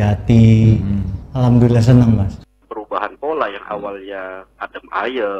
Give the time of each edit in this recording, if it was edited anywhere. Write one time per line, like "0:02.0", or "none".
0:02.4